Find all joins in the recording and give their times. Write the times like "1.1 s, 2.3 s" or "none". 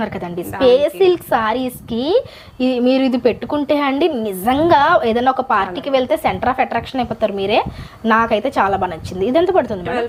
none